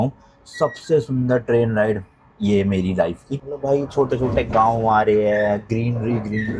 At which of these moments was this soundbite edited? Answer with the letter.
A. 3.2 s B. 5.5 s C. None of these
C